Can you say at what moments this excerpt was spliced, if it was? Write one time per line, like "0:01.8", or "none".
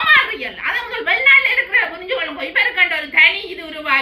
none